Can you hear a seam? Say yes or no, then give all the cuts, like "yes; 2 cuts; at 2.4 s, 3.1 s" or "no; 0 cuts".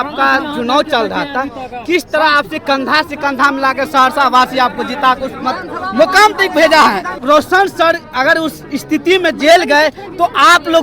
yes; 1 cut; at 7.2 s